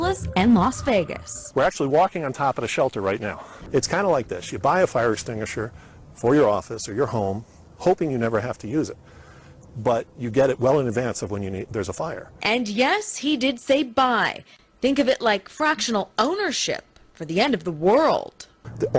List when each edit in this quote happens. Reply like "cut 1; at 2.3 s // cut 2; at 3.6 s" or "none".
cut 1; at 16.6 s